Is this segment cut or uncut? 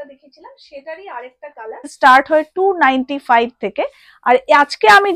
cut